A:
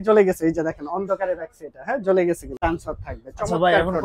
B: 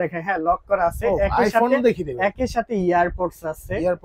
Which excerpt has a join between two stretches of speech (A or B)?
A